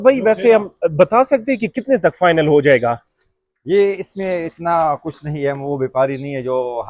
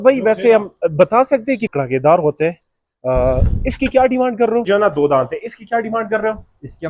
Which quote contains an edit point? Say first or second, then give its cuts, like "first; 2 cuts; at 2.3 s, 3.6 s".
second; 2 cuts; at 1.7 s, 4.7 s